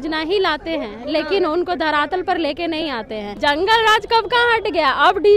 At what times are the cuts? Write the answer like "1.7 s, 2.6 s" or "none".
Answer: 3.2 s